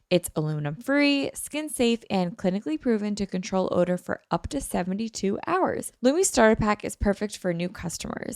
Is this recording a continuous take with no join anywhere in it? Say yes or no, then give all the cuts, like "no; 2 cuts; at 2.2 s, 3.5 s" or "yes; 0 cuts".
no; 1 cut; at 5.9 s